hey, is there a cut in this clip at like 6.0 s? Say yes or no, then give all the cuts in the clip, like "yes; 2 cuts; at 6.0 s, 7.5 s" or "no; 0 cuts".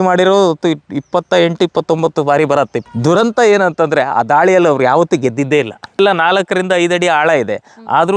yes; 2 cuts; at 2.8 s, 6.0 s